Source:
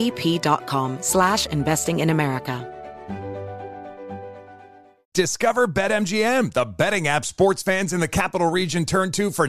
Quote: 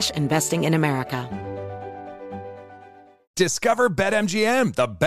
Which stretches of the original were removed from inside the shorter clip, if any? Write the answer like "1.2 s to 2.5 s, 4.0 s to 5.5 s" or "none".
2.6 s to 3.0 s